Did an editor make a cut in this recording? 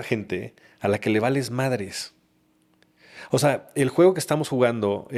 no; 0 cuts

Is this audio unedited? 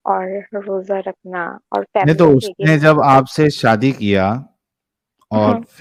yes; 0 cuts

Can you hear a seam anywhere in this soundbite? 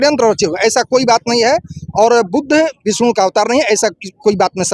no; 0 cuts

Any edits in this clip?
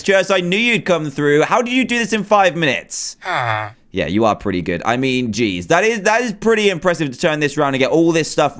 yes; 1 cut; at 4.9 s

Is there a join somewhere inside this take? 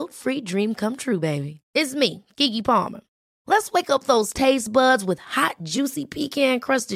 no; 0 cuts

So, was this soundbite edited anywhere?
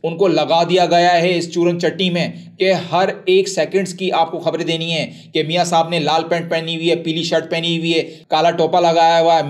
no; 0 cuts

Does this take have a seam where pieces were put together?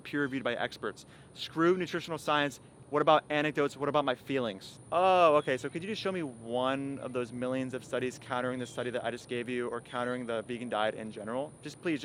no; 0 cuts

